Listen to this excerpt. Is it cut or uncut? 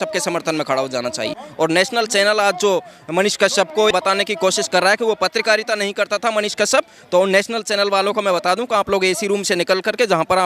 cut